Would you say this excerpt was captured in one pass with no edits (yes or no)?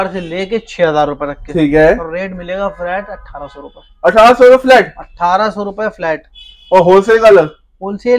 yes